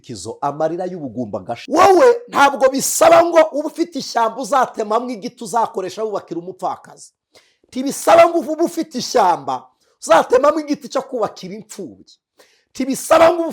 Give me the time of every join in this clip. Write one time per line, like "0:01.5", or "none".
0:01.6